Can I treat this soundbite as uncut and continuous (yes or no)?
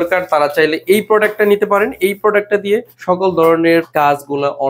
no